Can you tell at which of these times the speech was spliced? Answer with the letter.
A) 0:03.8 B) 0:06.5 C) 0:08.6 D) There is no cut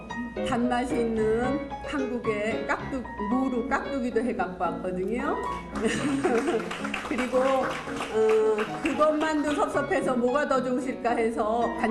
C